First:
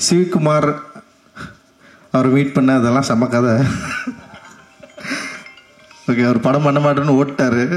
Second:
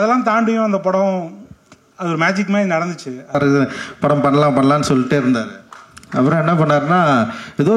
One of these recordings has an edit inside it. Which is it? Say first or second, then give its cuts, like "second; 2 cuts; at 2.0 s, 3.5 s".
second; 1 cut; at 3.3 s